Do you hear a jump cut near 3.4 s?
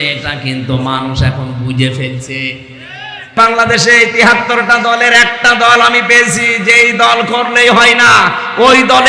yes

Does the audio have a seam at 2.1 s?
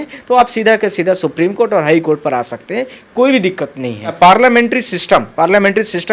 no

